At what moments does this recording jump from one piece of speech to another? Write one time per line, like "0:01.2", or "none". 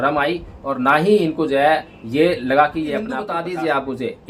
0:03.4

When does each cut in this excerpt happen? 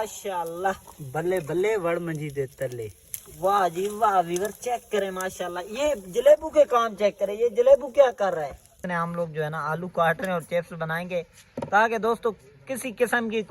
0:08.8

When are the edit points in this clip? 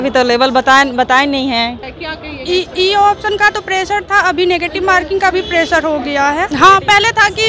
0:01.8
0:06.5

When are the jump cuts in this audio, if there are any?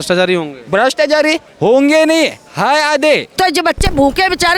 0:03.3

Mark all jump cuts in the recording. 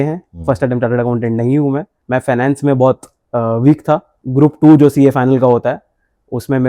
0:01.9
0:04.2

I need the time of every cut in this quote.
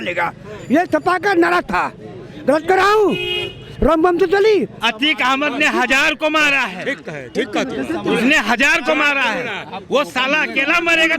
0:04.8

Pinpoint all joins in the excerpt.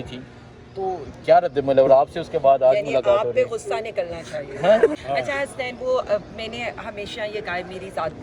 0:05.0

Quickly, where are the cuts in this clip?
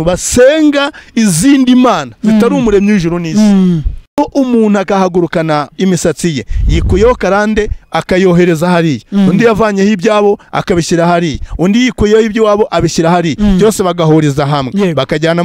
0:04.1

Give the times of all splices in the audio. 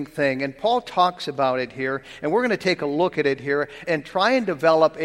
0:03.8

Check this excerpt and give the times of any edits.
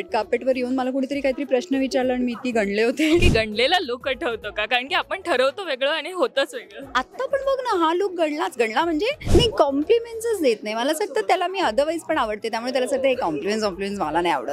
0:03.2
0:09.2

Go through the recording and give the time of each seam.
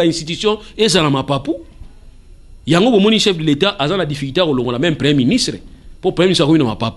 none

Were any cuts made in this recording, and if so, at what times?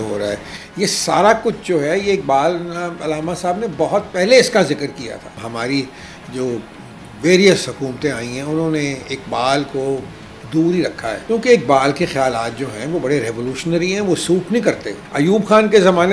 0:05.4
0:11.2
0:15.0

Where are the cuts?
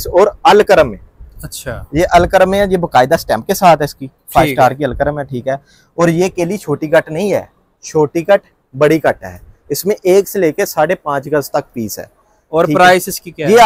none

